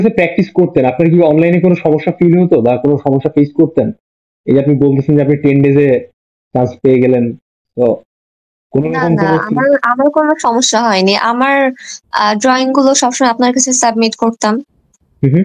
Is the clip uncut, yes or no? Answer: yes